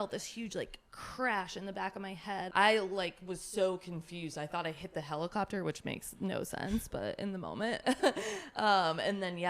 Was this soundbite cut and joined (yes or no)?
yes